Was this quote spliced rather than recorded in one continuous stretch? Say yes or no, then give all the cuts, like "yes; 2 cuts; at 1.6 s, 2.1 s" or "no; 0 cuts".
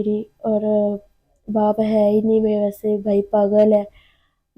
no; 0 cuts